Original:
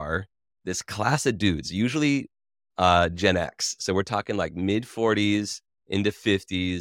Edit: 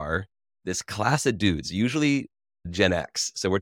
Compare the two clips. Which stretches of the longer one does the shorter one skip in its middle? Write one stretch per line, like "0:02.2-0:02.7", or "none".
0:02.7-0:03.1

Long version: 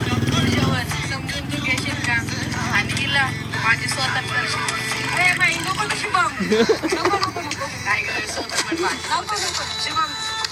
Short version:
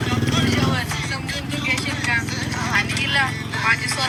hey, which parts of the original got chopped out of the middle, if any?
none

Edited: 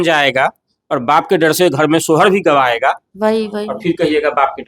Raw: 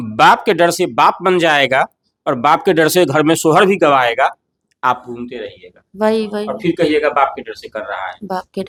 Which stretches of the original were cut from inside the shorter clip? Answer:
0:04.4-0:05.9

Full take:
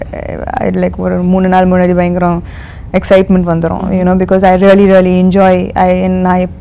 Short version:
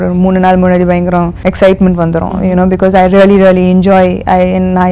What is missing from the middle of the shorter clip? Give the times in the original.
0:02.4-0:02.8

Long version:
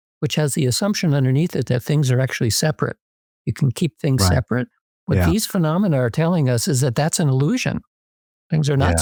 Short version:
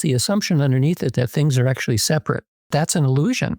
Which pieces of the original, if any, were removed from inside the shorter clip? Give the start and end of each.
0:03.2-0:06.9

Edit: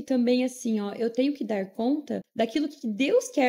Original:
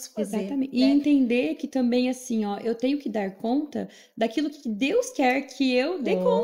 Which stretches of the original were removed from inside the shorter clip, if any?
0:03.9-0:04.0

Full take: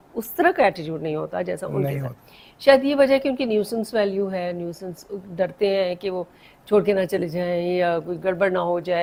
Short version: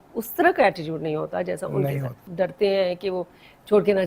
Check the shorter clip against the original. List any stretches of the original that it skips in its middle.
0:02.2-0:05.2

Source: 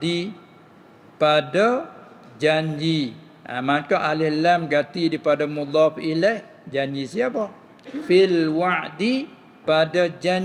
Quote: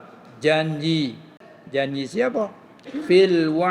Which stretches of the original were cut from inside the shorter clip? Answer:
0:03.5-0:06.5

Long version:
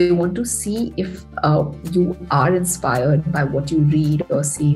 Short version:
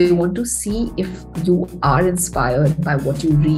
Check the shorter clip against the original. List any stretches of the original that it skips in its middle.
0:01.3-0:01.8

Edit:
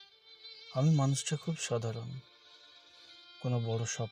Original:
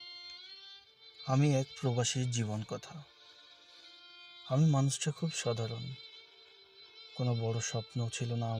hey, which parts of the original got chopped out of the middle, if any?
none

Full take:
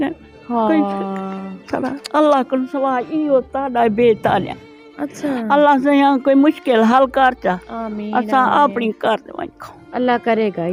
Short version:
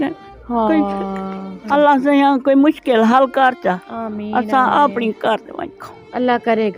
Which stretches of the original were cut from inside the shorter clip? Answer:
0:01.6-0:05.4

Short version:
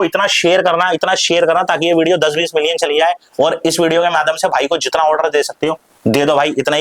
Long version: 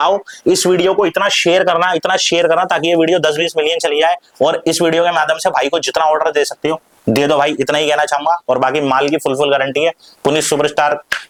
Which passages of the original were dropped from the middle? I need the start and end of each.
none

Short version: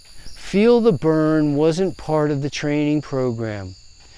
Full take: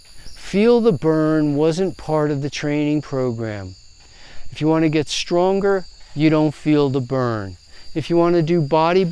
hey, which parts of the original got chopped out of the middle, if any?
none

